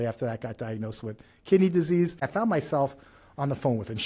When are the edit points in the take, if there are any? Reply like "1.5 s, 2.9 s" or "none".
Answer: 2.3 s